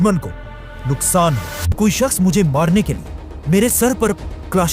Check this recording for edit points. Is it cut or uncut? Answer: cut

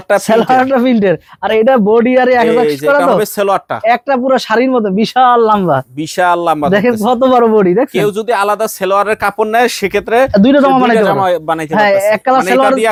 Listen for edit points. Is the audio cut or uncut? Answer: uncut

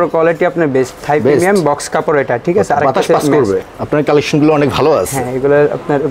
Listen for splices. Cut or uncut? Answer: cut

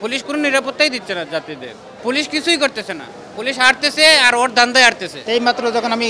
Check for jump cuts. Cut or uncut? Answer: cut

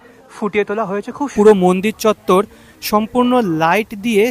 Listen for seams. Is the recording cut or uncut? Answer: cut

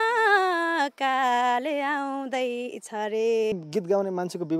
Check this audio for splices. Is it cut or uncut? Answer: cut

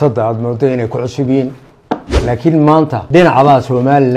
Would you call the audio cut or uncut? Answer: cut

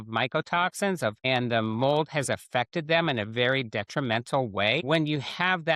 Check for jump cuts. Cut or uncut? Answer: cut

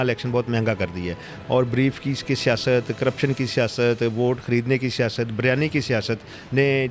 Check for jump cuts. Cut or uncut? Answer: uncut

